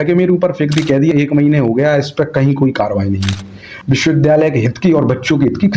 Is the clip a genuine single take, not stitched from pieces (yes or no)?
no